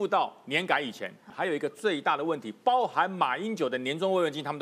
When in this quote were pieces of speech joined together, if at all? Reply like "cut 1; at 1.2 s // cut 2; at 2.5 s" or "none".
cut 1; at 1.2 s